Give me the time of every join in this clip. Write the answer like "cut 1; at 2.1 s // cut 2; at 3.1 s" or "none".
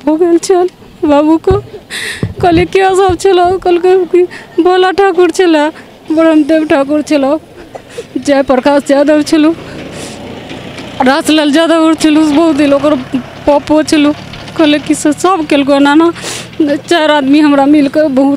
none

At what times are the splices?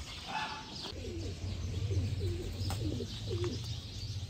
cut 1; at 0.9 s

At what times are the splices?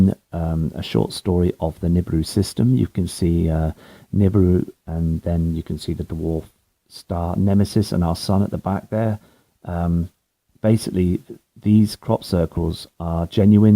cut 1; at 8.1 s

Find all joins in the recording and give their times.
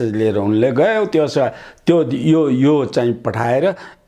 none

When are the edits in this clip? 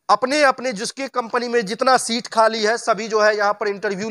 none

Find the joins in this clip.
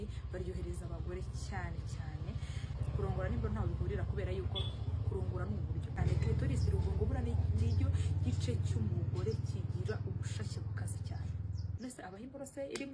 cut 1; at 2.8 s // cut 2; at 6.0 s // cut 3; at 11.7 s

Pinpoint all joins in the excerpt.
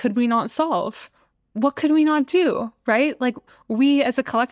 none

